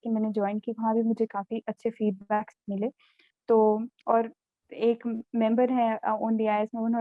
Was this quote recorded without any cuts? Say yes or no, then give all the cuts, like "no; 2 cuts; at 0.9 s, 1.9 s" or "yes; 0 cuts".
yes; 0 cuts